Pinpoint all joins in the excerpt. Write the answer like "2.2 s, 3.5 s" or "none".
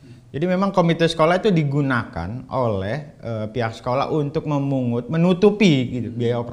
none